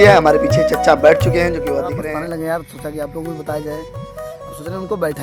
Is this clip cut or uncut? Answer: cut